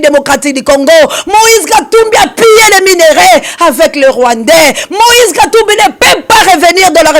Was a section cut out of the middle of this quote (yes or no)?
no